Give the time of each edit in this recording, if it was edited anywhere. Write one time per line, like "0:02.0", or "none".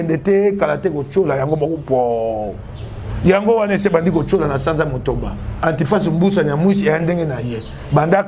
0:05.5